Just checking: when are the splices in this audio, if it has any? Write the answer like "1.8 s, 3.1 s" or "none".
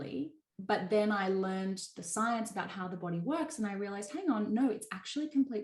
none